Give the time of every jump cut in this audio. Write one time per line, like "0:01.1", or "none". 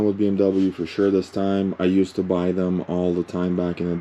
none